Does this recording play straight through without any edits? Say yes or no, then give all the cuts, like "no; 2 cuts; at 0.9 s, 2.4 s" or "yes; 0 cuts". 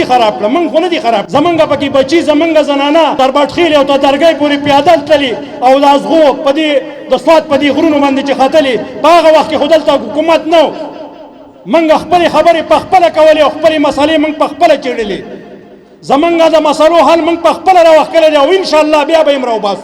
no; 2 cuts; at 1.3 s, 3.1 s